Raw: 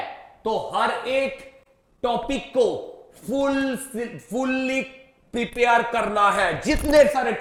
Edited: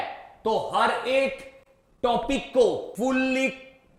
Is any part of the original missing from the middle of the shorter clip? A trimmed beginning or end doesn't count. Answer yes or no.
yes